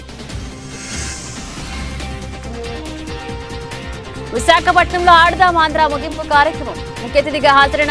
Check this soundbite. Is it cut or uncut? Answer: cut